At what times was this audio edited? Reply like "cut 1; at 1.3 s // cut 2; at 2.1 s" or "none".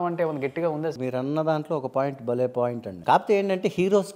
cut 1; at 1.0 s // cut 2; at 2.9 s